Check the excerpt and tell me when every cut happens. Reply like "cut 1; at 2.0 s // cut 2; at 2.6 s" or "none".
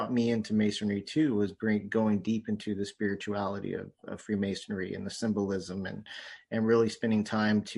none